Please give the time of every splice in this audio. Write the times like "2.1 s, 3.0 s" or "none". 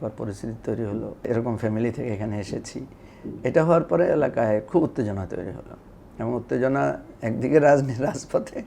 1.3 s